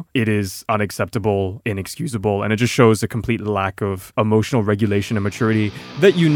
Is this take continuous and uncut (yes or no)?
yes